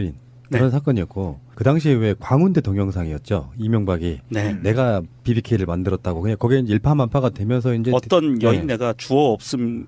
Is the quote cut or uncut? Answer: uncut